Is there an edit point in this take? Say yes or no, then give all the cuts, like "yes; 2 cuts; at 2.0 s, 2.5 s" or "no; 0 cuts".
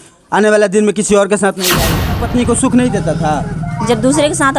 yes; 1 cut; at 2.1 s